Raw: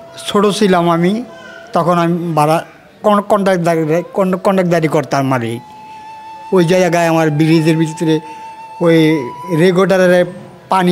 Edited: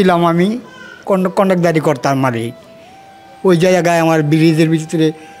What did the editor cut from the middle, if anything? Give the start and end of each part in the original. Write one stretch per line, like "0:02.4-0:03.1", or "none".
0:01.6-0:04.1